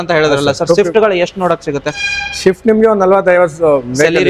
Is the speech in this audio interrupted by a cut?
no; 0 cuts

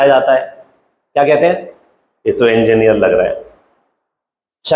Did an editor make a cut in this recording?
no; 0 cuts

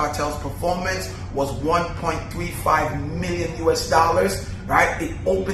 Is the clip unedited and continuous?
yes; 0 cuts

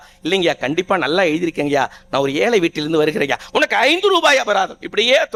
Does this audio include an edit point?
no; 0 cuts

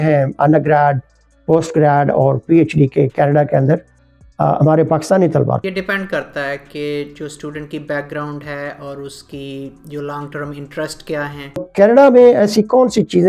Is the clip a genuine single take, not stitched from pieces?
no; 2 cuts; at 5.6 s, 11.7 s

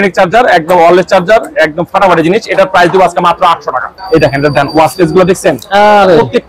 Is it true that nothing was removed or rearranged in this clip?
no; 1 cut; at 3.9 s

